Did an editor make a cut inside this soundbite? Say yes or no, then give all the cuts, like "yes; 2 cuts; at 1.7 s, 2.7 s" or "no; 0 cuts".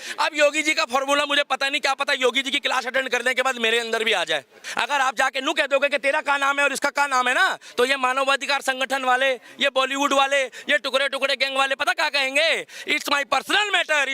yes; 1 cut; at 4.6 s